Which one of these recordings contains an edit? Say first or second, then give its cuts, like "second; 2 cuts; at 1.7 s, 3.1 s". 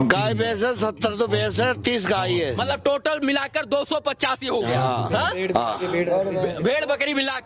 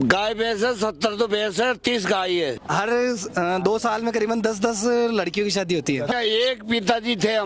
second; 2 cuts; at 2.6 s, 6.1 s